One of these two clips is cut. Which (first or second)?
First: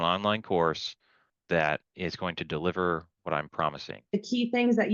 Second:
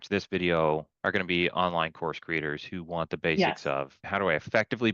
second